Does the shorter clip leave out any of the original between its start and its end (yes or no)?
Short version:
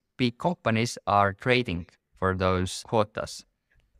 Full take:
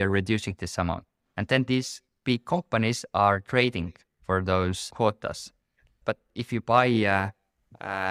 no